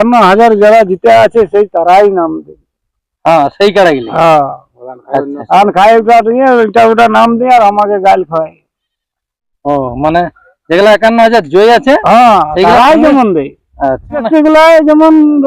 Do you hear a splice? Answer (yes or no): yes